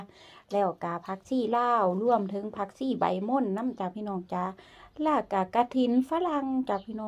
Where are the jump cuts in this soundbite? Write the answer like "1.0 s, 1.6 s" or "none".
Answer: none